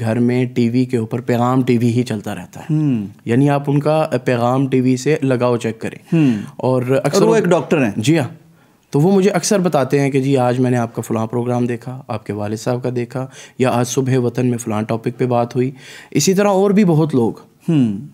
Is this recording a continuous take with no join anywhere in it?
yes; 0 cuts

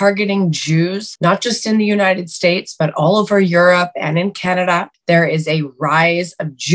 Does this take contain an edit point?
no; 0 cuts

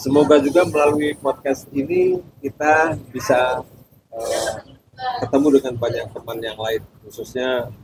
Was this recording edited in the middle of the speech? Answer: no; 0 cuts

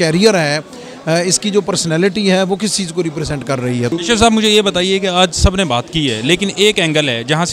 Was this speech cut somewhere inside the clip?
yes; 1 cut; at 3.9 s

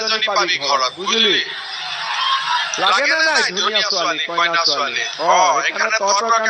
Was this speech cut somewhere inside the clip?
no; 0 cuts

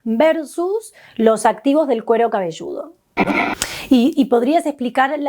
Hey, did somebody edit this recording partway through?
yes; 1 cut; at 3.3 s

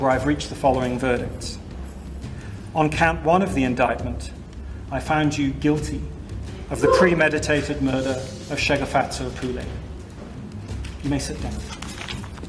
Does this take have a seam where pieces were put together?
no; 0 cuts

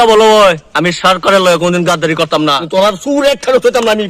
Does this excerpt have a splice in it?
yes; 1 cut; at 2.6 s

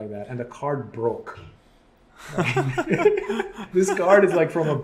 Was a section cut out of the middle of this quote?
yes; 1 cut; at 3.6 s

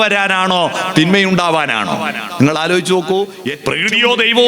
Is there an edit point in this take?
yes; 1 cut; at 3.5 s

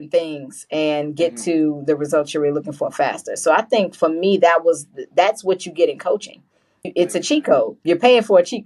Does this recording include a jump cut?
no; 0 cuts

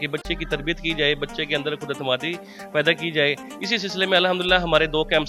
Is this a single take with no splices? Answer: yes; 0 cuts

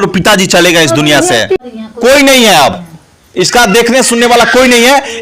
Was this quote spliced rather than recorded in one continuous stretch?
yes; 1 cut; at 1.6 s

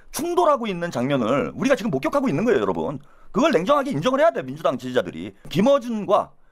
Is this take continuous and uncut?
no; 1 cut; at 5.5 s

